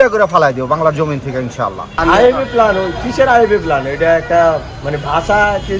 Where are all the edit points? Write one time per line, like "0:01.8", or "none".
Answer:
0:01.9